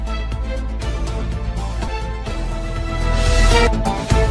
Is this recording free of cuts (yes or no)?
yes